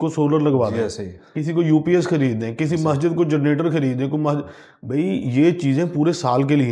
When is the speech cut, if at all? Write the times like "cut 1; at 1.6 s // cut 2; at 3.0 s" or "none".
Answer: none